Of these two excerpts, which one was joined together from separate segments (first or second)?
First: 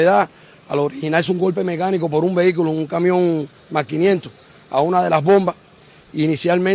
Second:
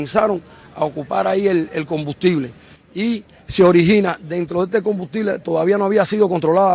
first